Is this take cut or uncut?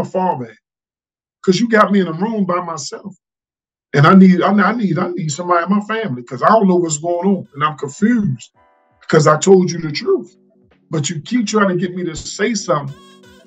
uncut